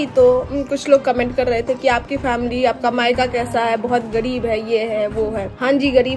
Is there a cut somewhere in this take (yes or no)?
no